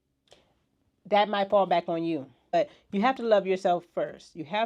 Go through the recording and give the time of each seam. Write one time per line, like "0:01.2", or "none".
0:02.5